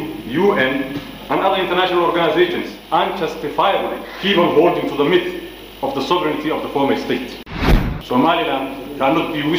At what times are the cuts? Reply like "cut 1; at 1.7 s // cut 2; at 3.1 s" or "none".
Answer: cut 1; at 2.7 s // cut 2; at 4.1 s // cut 3; at 7.5 s

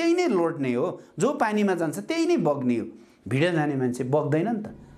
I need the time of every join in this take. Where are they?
none

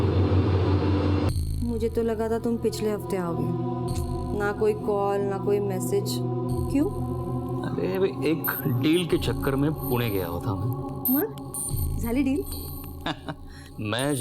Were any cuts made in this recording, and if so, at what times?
cut 1; at 1.3 s

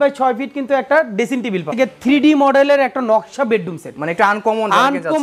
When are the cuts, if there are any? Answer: cut 1; at 1.7 s

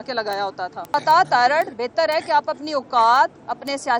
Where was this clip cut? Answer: cut 1; at 0.9 s

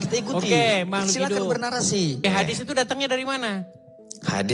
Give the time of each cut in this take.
cut 1; at 2.2 s

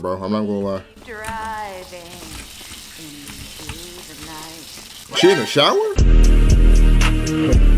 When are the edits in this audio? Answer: none

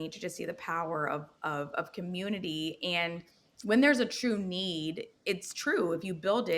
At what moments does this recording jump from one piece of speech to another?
none

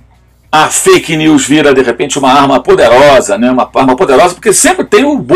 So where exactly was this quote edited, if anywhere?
none

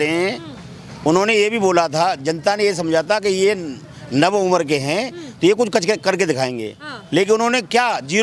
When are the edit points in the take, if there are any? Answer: none

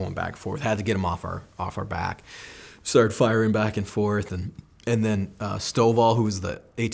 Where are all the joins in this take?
none

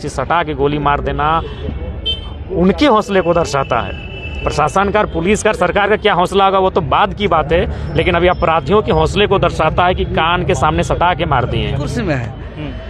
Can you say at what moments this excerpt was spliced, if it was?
cut 1; at 11.9 s

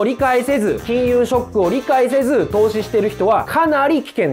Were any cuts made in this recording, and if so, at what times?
none

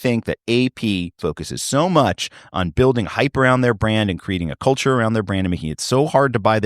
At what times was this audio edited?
cut 1; at 1.2 s

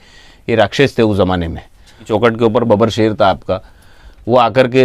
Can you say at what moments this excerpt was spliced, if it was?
cut 1; at 2.0 s

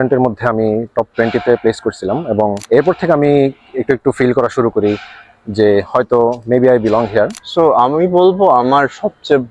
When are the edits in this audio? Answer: cut 1; at 2.6 s // cut 2; at 7.4 s

